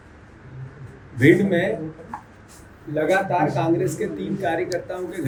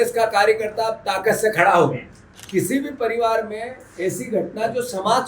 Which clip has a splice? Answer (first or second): second